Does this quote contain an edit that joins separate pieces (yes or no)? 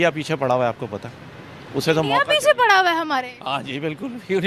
no